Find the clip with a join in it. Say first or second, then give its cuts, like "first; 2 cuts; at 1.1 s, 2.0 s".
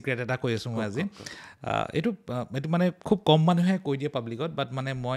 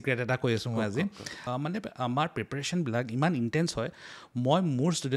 second; 1 cut; at 1.3 s